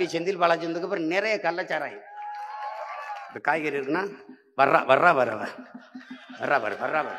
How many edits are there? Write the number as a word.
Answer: one